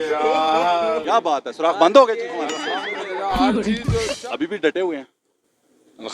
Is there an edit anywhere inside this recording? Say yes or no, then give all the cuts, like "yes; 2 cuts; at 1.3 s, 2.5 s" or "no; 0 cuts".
yes; 1 cut; at 4.2 s